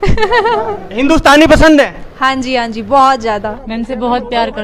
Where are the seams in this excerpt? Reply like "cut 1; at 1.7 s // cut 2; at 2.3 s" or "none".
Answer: cut 1; at 3.6 s